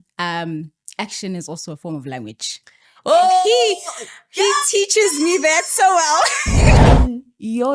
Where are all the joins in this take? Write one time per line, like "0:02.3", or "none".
0:06.8

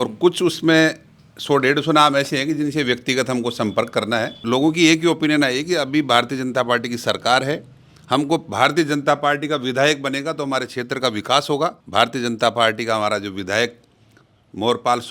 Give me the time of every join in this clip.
0:04.4
0:11.8

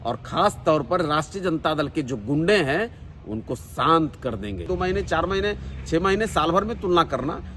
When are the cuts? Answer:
0:04.7

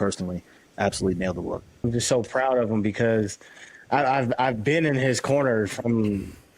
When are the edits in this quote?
0:01.9

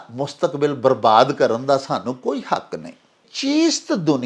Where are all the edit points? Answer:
0:03.3

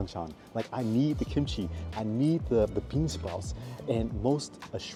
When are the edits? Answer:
none

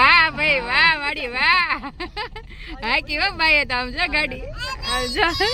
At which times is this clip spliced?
none

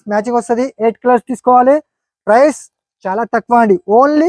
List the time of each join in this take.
none

